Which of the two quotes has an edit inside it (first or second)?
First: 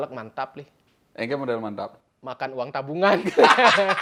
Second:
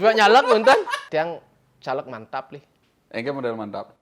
second